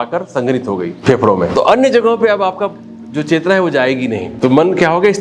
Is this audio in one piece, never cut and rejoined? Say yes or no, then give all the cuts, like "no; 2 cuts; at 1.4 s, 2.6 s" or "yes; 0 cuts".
no; 2 cuts; at 1.4 s, 4.3 s